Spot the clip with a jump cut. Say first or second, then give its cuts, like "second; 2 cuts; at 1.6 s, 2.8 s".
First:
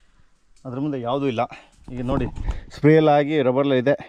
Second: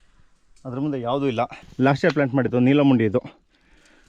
second; 1 cut; at 1.6 s